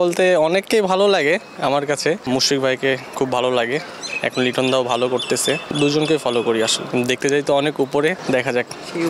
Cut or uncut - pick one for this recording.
cut